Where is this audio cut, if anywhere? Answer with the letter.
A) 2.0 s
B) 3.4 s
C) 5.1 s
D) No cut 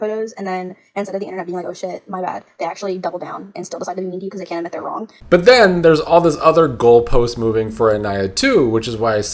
C